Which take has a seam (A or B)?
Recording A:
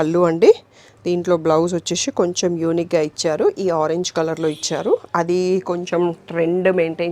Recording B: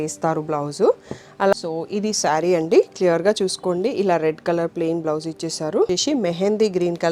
B